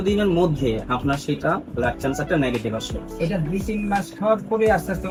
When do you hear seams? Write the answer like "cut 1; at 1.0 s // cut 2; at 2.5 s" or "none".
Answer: none

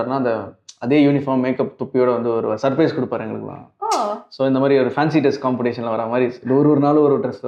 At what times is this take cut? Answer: none

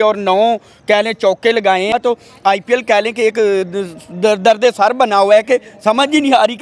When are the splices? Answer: cut 1; at 1.9 s

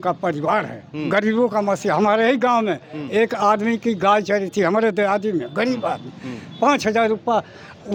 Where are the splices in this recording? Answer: none

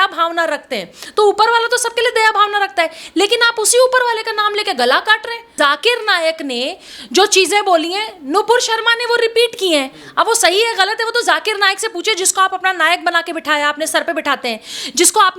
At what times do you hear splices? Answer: cut 1; at 5.5 s

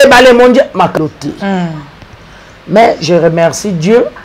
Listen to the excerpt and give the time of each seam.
cut 1; at 0.9 s

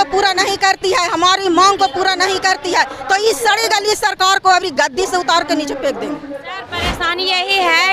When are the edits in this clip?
cut 1; at 6.8 s

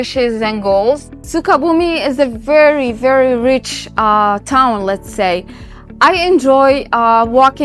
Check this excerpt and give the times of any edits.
cut 1; at 1.3 s

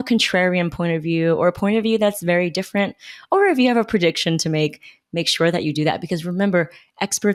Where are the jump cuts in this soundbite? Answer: none

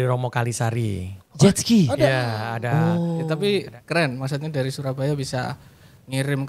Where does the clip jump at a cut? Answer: cut 1; at 3.3 s

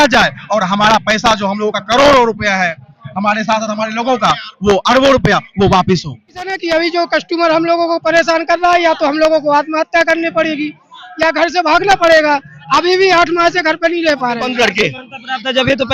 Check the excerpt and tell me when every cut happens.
cut 1; at 6.6 s // cut 2; at 14.5 s

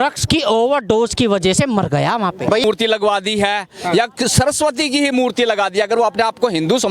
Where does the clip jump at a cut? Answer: cut 1; at 2.6 s

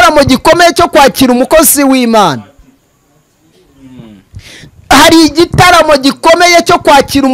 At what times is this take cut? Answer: none

